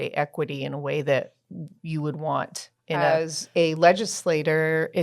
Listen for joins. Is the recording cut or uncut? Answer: cut